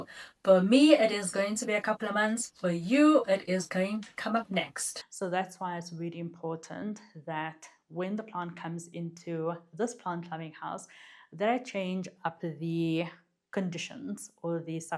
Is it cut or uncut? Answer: cut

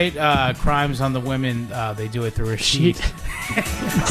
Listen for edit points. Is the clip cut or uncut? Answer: uncut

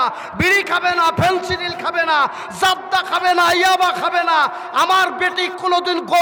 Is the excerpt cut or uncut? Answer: uncut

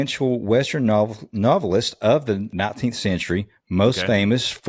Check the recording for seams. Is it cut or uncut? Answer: cut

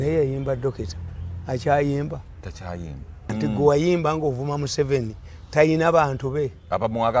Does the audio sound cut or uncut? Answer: cut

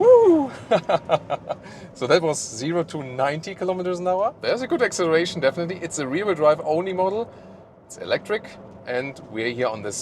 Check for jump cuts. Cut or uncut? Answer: cut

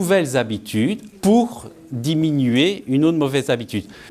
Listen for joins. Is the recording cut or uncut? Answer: cut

